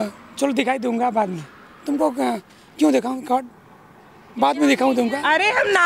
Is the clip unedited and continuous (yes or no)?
yes